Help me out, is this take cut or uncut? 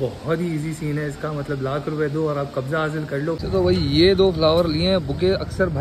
cut